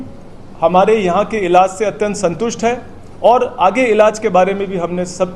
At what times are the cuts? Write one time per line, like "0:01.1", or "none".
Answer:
none